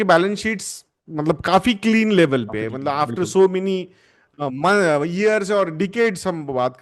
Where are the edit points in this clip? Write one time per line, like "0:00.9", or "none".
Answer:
none